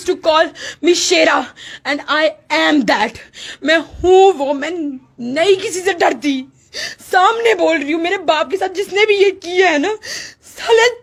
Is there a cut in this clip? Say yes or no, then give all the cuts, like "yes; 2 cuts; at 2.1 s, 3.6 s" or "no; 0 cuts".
no; 0 cuts